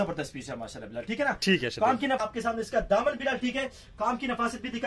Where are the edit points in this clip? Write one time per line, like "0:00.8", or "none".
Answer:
0:02.2

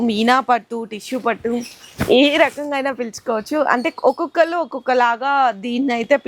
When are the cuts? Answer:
none

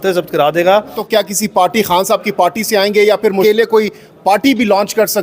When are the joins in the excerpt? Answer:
0:01.0
0:03.9

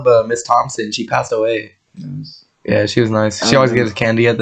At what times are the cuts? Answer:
none

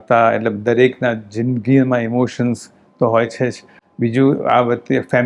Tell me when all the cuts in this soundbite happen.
none

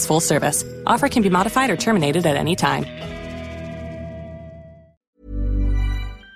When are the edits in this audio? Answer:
0:04.8

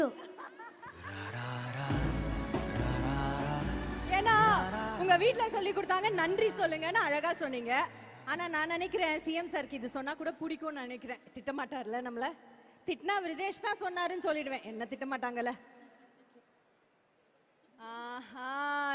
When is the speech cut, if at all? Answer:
none

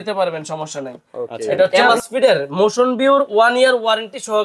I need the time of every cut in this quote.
0:01.7

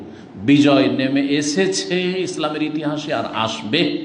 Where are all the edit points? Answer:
none

